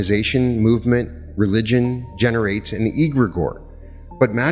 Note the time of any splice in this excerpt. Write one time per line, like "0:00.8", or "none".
none